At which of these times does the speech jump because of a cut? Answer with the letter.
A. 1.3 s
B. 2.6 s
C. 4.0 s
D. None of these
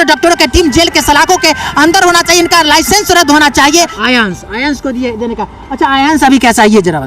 C